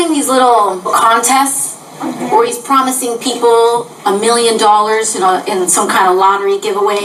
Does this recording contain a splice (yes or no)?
no